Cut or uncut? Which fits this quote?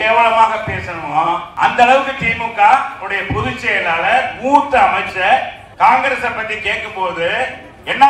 cut